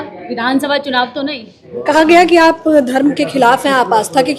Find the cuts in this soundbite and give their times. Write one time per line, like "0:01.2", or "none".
0:01.7